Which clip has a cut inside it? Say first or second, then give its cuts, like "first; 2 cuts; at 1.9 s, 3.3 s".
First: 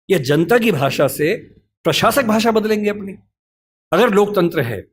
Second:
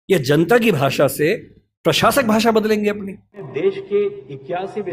second; 1 cut; at 3.4 s